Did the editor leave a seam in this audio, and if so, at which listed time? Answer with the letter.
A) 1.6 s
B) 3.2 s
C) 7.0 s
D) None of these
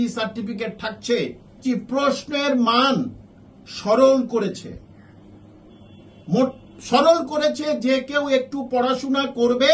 A